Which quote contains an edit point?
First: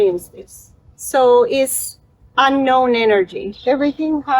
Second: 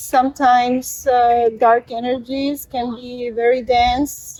first; 1 cut; at 3.5 s

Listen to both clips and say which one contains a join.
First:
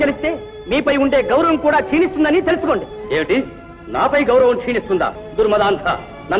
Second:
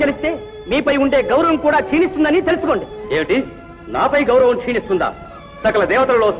first; 1 cut; at 5.2 s

